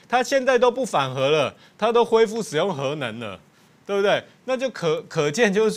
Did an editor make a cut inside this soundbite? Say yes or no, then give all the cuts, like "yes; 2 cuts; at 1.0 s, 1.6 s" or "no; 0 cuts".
no; 0 cuts